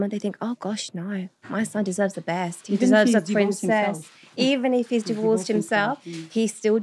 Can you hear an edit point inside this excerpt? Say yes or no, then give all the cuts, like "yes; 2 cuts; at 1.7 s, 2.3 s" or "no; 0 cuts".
no; 0 cuts